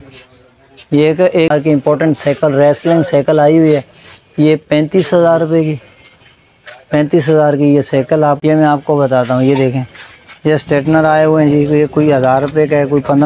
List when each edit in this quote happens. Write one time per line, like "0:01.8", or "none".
0:01.5
0:08.4

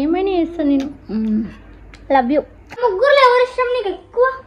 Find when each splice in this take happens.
0:02.8

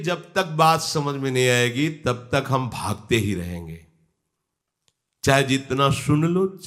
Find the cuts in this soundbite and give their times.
none

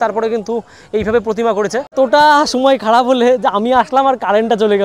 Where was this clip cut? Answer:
0:01.9

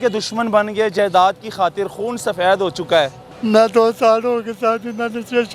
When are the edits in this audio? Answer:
0:03.2

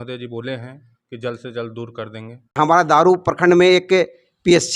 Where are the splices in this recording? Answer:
0:02.6

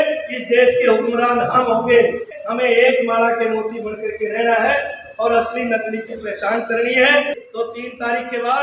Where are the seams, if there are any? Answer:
0:02.3
0:07.4

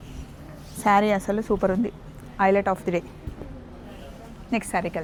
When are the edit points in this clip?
none

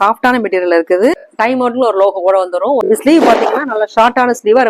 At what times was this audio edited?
0:01.3
0:02.8

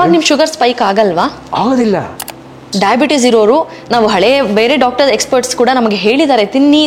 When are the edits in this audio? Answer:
0:02.6

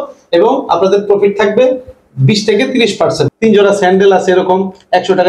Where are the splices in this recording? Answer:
0:03.3

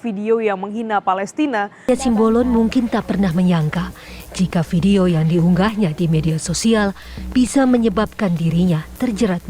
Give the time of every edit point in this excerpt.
0:01.9

